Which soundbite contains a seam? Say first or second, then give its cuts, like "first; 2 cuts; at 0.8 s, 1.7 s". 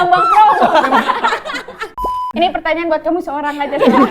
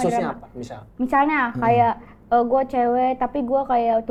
first; 1 cut; at 1.9 s